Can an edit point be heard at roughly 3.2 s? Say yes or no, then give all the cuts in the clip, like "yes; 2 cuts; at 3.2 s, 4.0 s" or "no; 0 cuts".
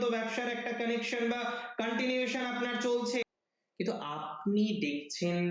yes; 1 cut; at 3.2 s